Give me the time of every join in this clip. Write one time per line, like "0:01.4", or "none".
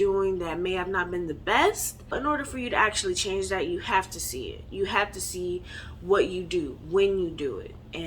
0:02.1